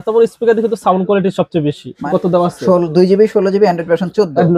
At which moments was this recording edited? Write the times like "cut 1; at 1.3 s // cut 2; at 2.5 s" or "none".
cut 1; at 1.9 s